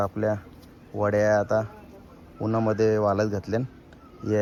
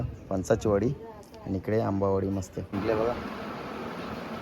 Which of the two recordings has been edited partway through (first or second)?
second